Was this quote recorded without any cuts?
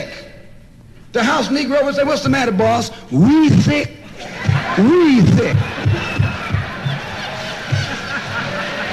no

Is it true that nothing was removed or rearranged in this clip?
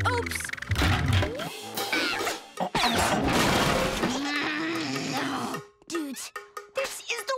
no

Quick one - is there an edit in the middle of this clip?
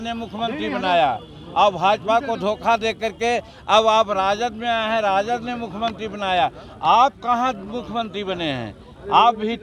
no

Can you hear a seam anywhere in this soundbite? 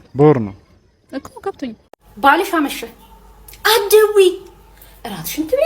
yes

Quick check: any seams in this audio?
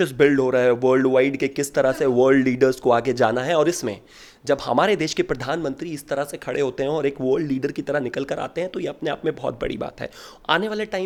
no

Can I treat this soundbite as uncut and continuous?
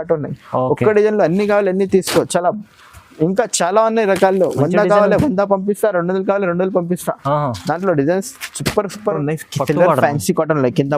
no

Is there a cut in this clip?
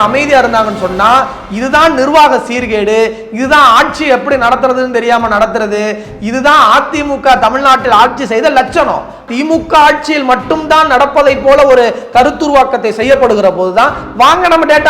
yes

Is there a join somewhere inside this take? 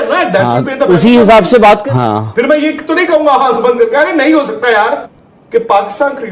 yes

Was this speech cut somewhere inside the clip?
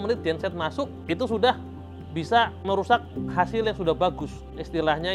no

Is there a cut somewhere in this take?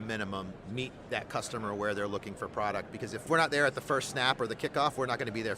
yes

